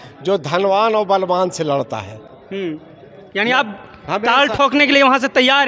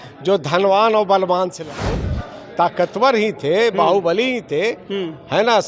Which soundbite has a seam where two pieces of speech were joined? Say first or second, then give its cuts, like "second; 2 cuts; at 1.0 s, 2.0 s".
second; 1 cut; at 2.0 s